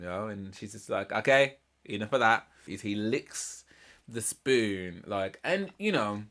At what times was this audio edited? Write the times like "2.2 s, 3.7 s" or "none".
2.7 s